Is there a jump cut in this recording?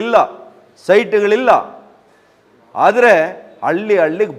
no; 0 cuts

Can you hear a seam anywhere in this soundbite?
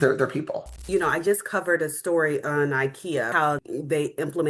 yes; 2 cuts; at 0.9 s, 3.4 s

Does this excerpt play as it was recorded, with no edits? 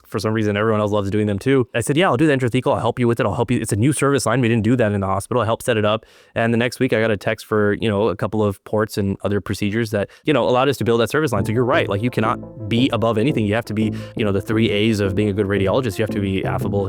no; 1 cut; at 1.8 s

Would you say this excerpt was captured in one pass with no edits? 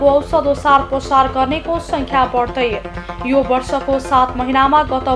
yes; 0 cuts

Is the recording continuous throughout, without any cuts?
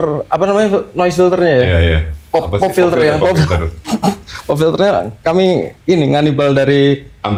yes; 0 cuts

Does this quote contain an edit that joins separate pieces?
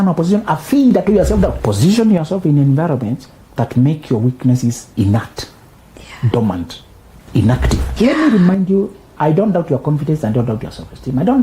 yes; 3 cuts; at 1.6 s, 4.8 s, 7.8 s

